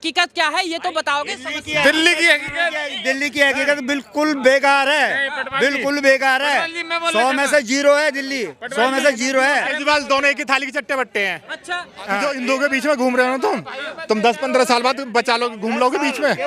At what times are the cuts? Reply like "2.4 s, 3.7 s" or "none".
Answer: 12.2 s